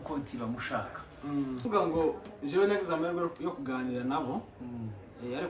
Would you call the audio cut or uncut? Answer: cut